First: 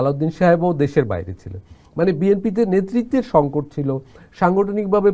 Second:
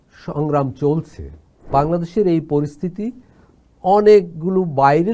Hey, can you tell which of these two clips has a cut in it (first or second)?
second